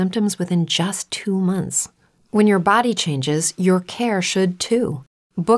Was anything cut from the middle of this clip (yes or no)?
yes